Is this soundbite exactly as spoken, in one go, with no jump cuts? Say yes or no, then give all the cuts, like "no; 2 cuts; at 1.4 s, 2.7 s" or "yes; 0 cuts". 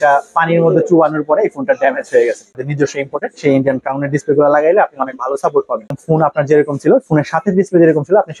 no; 2 cuts; at 2.5 s, 5.9 s